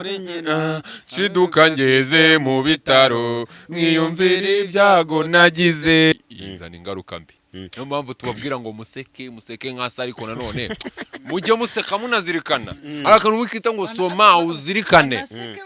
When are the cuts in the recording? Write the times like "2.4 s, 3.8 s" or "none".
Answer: 6.1 s